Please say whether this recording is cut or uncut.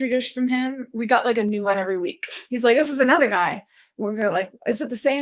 uncut